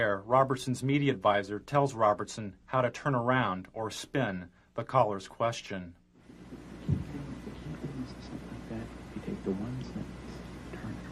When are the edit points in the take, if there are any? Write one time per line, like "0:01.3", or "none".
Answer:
none